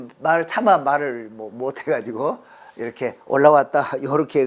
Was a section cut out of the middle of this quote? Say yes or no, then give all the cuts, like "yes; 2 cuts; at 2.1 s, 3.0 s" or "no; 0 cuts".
no; 0 cuts